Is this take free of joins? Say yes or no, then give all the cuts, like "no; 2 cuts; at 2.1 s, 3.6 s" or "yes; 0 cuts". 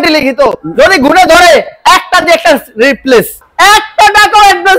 no; 1 cut; at 3.4 s